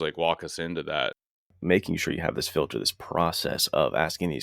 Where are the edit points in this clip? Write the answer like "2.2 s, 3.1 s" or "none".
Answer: 1.5 s

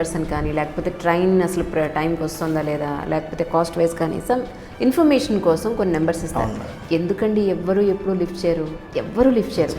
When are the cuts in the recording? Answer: 8.8 s

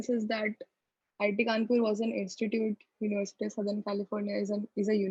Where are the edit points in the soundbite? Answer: none

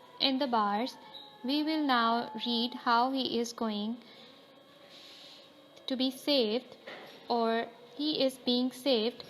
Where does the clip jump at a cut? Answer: 5.1 s

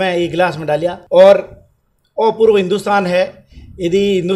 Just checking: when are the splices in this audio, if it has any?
1.0 s

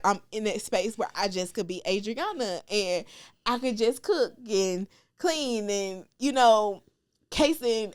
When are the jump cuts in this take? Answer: none

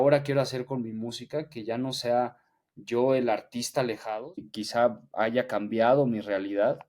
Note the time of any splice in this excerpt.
4.5 s

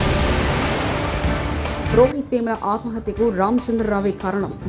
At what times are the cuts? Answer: 1.9 s

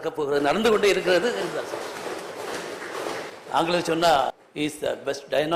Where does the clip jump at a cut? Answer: 3.3 s, 4.4 s

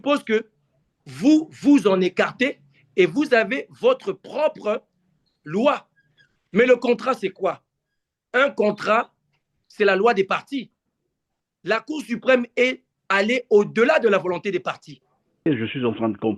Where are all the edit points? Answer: 15.5 s

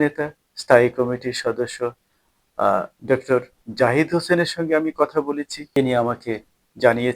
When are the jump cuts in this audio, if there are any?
5.6 s

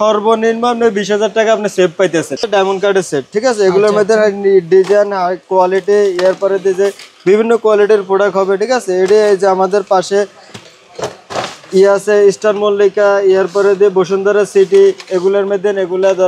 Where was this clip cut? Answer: 2.5 s

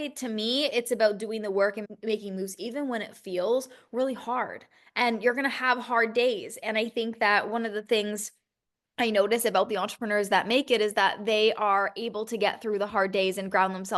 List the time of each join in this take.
none

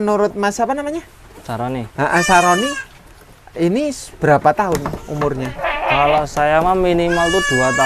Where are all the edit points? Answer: none

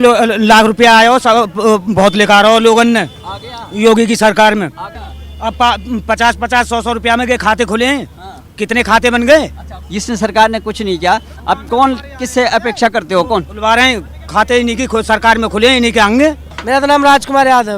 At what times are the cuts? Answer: none

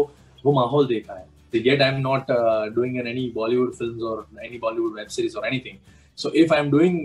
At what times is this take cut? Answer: 1.5 s

